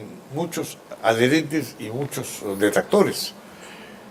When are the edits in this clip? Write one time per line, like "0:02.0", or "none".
none